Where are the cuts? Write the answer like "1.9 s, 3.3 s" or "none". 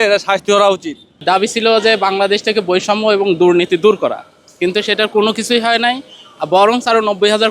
1.2 s

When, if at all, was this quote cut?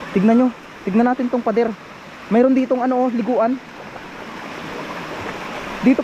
none

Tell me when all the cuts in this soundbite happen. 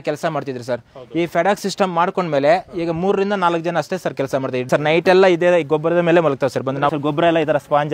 4.7 s, 6.9 s

